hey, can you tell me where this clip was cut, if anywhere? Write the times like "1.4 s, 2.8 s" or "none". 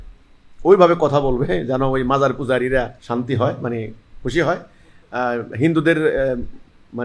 3.0 s